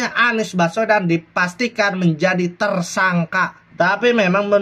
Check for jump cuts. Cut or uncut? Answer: cut